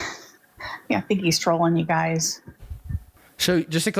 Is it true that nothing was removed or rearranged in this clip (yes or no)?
yes